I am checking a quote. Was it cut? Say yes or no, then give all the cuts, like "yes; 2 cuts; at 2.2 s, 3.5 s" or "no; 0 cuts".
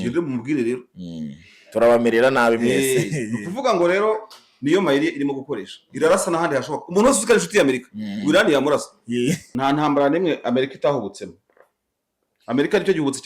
yes; 1 cut; at 9.5 s